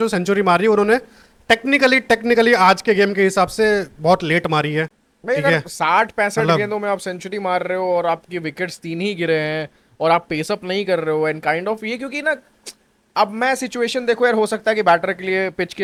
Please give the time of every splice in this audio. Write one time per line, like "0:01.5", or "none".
none